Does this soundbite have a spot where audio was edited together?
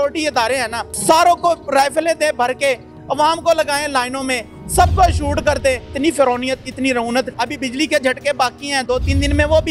yes; 2 cuts; at 5.9 s, 7.3 s

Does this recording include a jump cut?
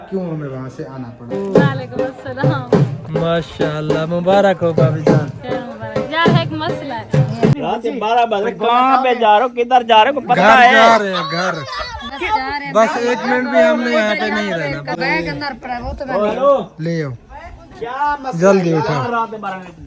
yes; 3 cuts; at 1.3 s, 7.6 s, 15.0 s

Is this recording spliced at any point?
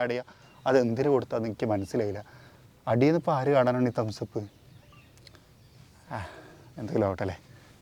no; 0 cuts

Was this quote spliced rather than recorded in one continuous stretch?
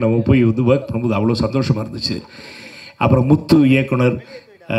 no; 0 cuts

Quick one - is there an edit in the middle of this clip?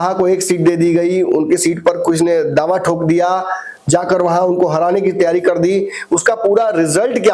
no; 0 cuts

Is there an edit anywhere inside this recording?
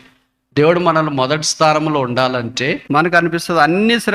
yes; 1 cut; at 2.8 s

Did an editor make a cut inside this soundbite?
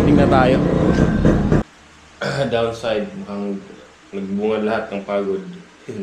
yes; 1 cut; at 1.6 s

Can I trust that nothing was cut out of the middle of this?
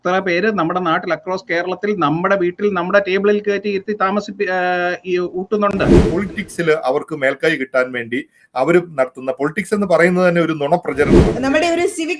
no; 2 cuts; at 6.0 s, 11.2 s

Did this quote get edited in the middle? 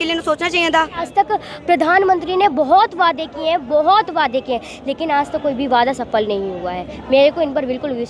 yes; 1 cut; at 1.0 s

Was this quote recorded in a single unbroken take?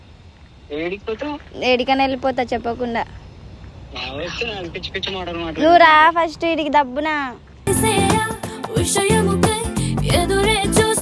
yes; 0 cuts

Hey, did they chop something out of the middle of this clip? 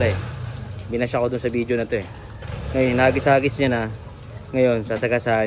no; 0 cuts

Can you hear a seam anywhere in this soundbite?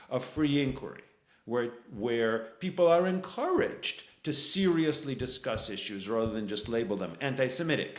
no; 0 cuts

